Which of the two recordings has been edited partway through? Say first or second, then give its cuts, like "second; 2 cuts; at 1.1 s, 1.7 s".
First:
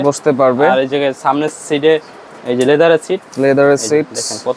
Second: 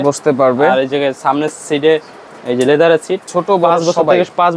second; 1 cut; at 3.2 s